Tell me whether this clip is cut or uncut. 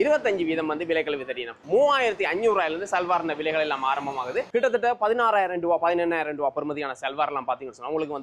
cut